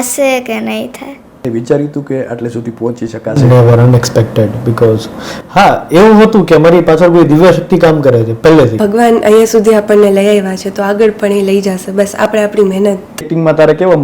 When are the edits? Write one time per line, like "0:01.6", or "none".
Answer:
0:01.4
0:08.8
0:13.3